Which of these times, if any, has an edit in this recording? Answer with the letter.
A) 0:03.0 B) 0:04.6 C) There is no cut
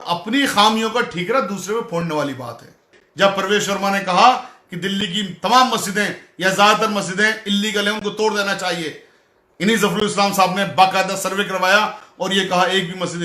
A